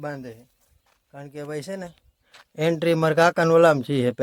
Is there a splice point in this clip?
no; 0 cuts

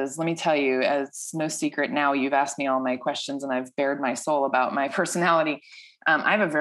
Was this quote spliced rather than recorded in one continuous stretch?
no; 0 cuts

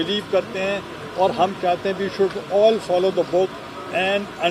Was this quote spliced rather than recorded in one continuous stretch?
no; 0 cuts

